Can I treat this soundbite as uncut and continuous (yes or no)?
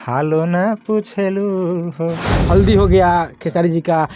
no